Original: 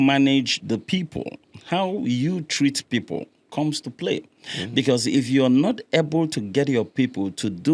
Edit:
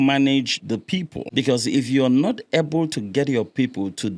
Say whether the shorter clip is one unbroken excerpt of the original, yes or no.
no